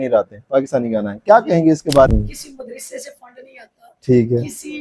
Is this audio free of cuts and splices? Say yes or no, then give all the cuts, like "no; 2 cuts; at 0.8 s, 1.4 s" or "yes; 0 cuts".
no; 1 cut; at 2.1 s